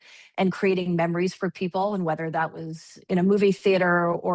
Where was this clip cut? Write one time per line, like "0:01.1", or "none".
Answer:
0:03.0